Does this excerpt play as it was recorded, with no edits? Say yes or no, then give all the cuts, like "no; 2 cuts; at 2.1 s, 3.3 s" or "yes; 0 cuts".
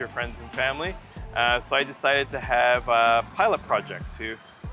yes; 0 cuts